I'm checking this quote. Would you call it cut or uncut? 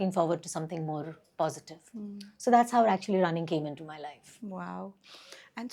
uncut